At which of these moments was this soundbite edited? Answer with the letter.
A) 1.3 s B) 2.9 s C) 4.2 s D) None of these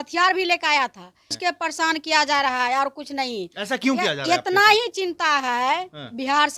A